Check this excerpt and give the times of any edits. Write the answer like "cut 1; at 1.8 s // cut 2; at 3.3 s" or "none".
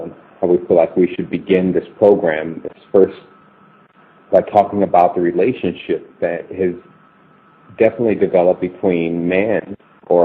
none

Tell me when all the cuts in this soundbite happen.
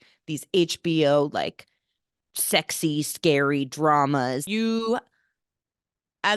cut 1; at 4.4 s

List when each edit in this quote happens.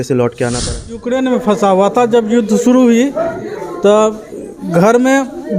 cut 1; at 1.0 s

